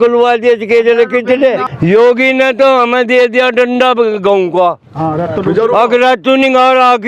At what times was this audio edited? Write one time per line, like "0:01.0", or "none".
0:01.6